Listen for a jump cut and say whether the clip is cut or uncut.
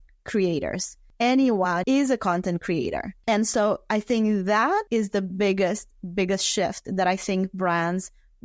cut